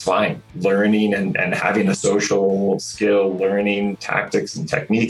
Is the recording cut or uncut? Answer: cut